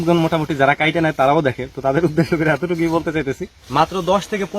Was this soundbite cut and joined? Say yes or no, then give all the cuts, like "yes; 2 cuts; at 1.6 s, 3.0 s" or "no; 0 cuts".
yes; 1 cut; at 3.5 s